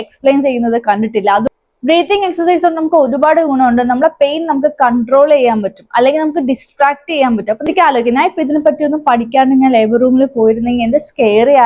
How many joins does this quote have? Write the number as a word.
two